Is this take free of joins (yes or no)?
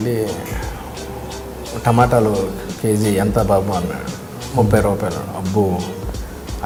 yes